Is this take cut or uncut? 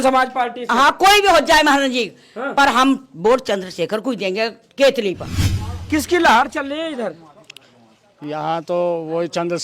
cut